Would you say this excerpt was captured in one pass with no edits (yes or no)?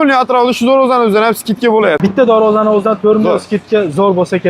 no